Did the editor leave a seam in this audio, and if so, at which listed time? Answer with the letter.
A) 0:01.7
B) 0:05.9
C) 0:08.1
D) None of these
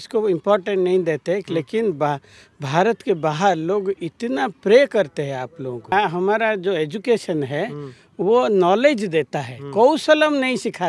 B